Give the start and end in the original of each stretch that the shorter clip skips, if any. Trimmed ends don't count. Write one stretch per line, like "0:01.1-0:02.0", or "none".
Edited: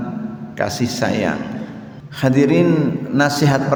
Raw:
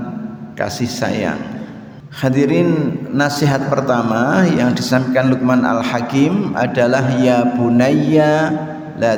none